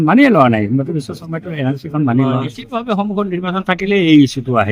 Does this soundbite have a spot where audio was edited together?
yes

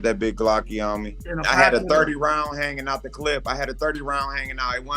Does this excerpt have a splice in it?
yes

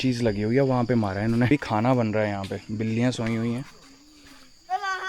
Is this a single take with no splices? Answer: no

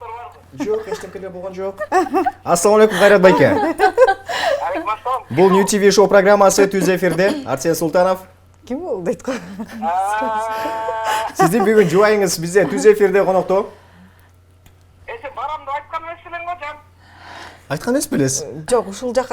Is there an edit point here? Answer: no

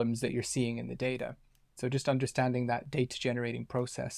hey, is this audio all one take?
no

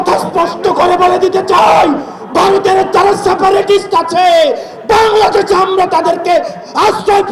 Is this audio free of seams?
yes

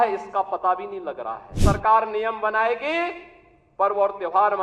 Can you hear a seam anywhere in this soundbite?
yes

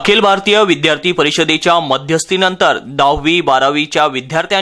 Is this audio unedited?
yes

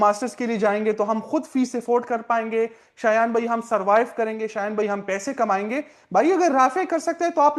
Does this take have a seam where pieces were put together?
no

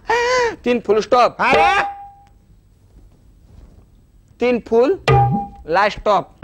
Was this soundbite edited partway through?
no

